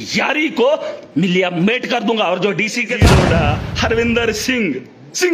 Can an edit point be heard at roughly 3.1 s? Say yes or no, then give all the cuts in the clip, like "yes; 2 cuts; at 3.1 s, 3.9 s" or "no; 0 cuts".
yes; 1 cut; at 3.1 s